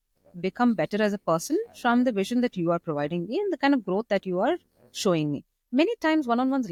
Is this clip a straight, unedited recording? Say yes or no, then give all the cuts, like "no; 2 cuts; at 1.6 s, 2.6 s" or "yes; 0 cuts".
yes; 0 cuts